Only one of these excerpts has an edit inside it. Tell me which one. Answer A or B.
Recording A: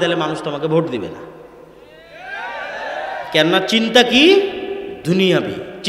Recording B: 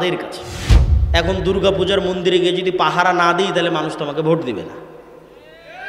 B